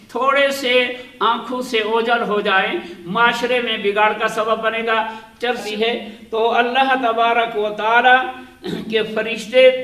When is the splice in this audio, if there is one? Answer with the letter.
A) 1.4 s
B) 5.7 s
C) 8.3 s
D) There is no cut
B